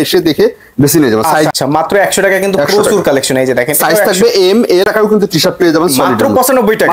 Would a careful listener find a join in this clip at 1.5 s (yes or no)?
yes